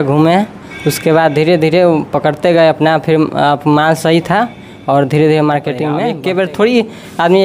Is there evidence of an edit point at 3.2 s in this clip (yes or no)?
no